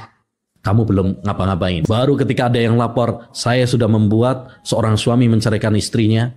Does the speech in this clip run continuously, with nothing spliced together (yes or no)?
no